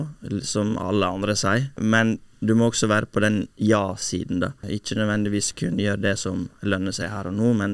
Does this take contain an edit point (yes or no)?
yes